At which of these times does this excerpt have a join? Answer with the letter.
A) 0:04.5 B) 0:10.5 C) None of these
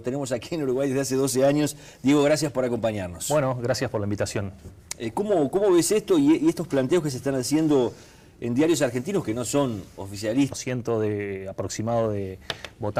C